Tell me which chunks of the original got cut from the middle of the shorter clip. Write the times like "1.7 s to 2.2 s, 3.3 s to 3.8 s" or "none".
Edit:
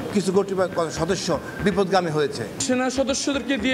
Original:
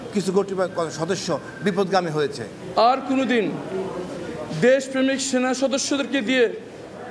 2.6 s to 5.2 s